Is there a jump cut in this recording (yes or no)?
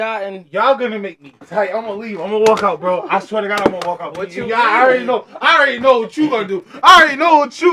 no